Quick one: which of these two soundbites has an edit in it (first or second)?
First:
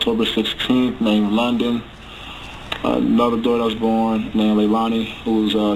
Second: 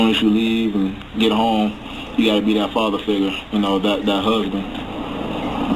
second